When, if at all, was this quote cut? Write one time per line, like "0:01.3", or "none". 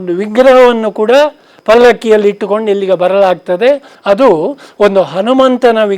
0:03.9